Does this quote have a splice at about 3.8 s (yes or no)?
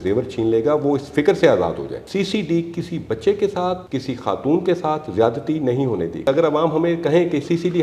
no